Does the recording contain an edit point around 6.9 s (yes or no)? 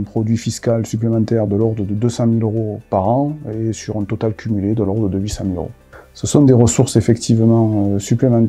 no